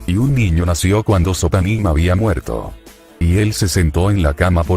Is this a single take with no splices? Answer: yes; 0 cuts

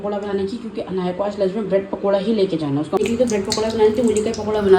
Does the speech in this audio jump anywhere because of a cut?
yes; 1 cut; at 3.0 s

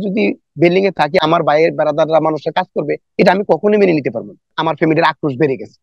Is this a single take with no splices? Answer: no; 2 cuts; at 1.2 s, 4.5 s

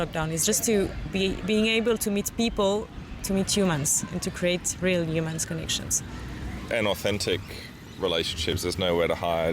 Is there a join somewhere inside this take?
yes; 2 cuts; at 3.0 s, 6.6 s

